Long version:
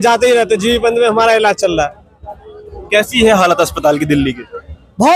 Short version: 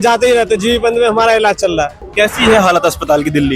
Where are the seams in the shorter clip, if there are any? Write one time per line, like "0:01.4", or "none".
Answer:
0:02.0